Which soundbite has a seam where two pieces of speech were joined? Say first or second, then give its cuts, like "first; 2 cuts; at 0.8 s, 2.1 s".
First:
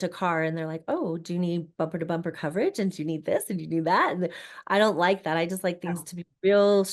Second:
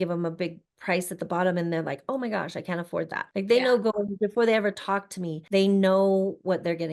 second; 2 cuts; at 3.2 s, 5.4 s